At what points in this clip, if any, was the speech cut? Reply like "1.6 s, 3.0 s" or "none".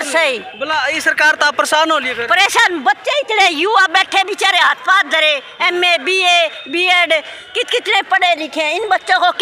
none